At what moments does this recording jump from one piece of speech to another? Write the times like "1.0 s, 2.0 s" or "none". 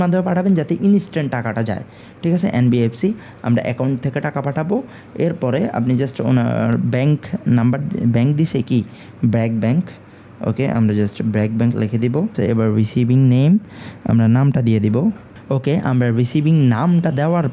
none